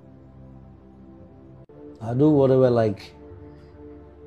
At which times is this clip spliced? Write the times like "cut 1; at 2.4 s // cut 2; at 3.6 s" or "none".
cut 1; at 2.1 s